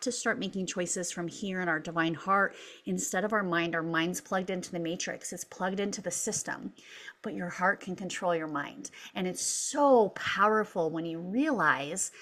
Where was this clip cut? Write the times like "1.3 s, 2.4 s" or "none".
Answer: none